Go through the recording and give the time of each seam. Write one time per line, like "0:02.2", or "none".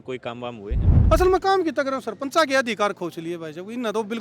0:00.9